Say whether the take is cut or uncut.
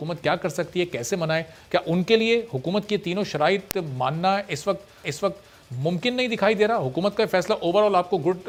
uncut